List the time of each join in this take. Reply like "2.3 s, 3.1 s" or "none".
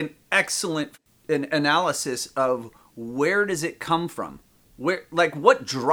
1.0 s